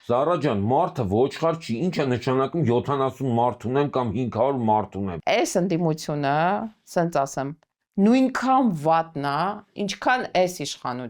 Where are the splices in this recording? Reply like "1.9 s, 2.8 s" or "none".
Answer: 5.1 s